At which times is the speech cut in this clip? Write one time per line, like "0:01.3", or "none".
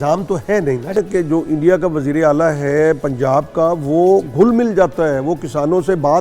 0:01.0